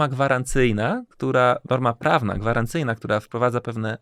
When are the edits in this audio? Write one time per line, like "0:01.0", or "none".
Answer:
none